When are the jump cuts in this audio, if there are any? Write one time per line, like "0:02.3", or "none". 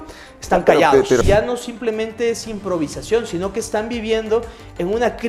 0:01.2